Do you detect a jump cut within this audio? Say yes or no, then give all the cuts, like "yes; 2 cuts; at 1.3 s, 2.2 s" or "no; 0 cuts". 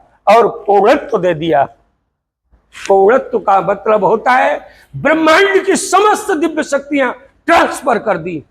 no; 0 cuts